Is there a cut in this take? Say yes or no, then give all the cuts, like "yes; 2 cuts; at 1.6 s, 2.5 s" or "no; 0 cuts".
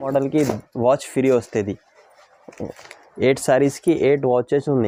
no; 0 cuts